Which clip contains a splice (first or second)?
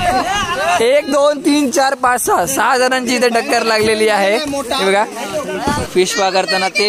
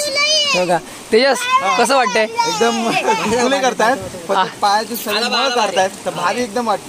first